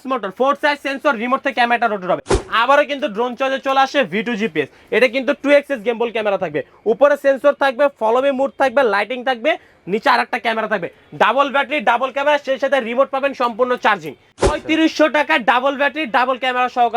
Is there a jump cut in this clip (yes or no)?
yes